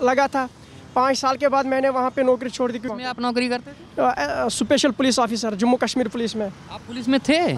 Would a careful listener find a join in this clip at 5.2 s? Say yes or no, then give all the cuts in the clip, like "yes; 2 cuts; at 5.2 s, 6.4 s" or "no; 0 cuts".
no; 1 cut; at 2.9 s